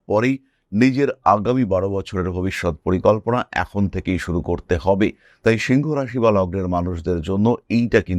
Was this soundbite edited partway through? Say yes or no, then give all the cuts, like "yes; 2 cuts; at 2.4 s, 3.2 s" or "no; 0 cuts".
no; 0 cuts